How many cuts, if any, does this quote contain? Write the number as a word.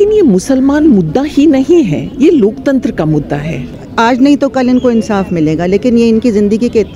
one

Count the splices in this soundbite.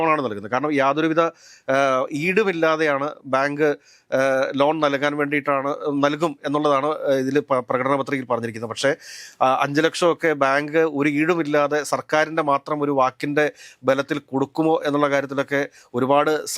zero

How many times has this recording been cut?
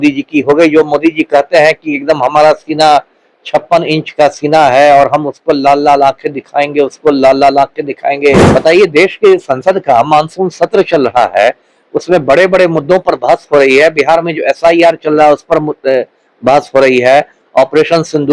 one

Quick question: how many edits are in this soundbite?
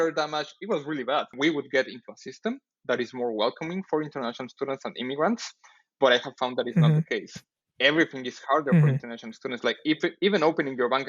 one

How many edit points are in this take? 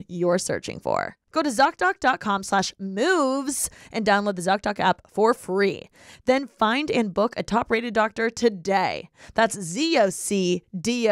one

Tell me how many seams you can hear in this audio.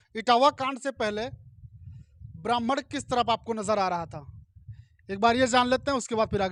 zero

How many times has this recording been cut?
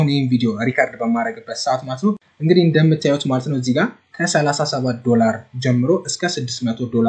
one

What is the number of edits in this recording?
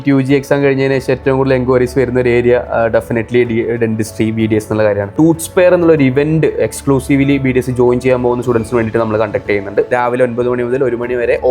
two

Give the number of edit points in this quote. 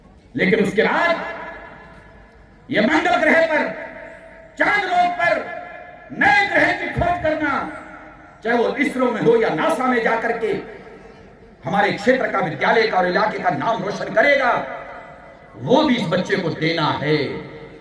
zero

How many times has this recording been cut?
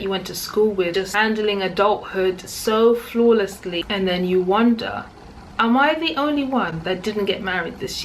two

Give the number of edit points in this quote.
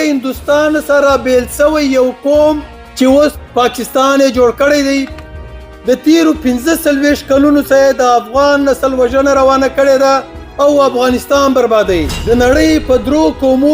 two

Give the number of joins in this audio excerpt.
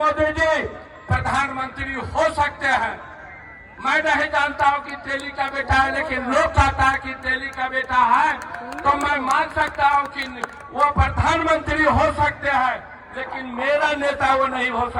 zero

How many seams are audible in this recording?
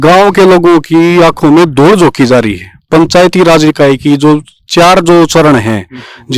zero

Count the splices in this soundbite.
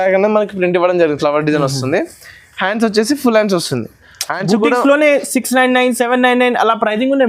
zero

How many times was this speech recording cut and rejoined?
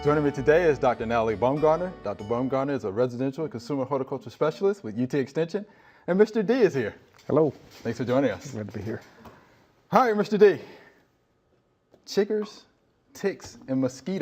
one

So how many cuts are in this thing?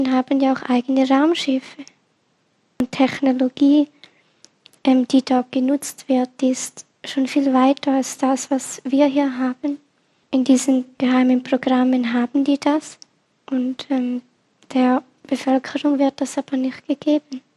two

